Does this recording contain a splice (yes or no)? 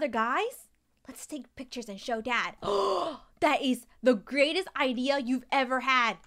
no